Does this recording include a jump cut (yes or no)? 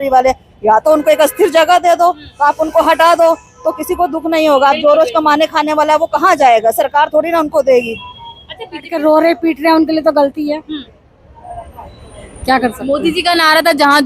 yes